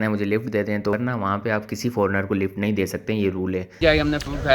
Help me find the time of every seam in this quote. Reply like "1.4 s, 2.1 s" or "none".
0.9 s, 3.8 s